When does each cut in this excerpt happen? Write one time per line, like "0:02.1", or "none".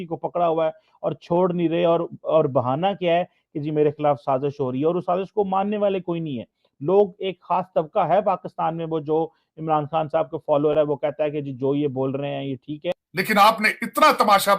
0:12.6

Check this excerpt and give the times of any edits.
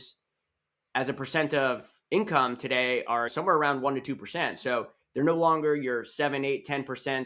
0:03.3

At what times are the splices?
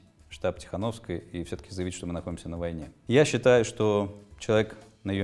0:02.9

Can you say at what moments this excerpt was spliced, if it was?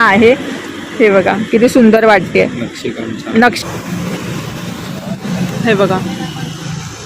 0:03.6

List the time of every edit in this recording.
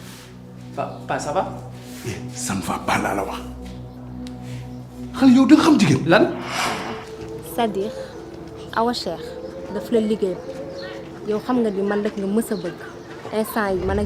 0:06.6

